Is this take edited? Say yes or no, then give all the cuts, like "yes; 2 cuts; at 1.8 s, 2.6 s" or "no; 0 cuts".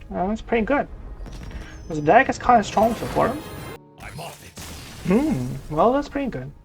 yes; 1 cut; at 3.8 s